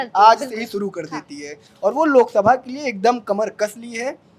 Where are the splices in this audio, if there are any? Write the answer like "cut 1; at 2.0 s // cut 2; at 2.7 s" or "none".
none